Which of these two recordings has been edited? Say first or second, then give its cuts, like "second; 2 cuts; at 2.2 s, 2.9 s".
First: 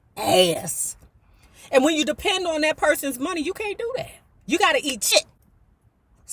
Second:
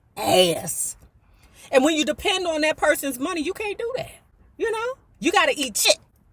first; 1 cut; at 4.3 s